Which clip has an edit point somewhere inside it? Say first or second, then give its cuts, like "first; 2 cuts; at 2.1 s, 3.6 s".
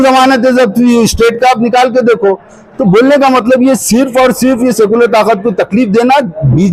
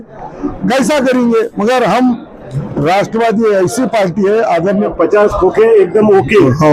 second; 1 cut; at 4.9 s